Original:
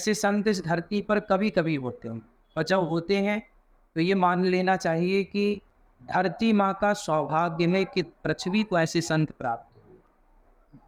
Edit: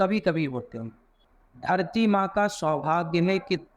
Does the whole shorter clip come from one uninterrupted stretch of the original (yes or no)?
no